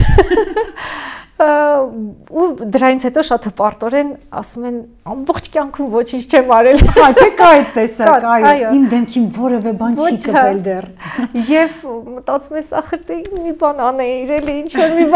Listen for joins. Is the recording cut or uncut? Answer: uncut